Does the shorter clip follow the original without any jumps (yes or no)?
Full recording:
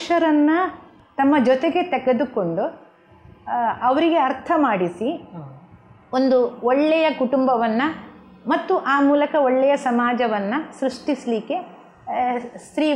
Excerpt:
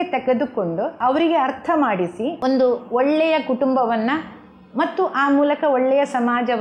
no